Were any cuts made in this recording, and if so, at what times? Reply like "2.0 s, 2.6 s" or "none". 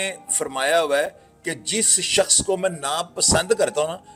none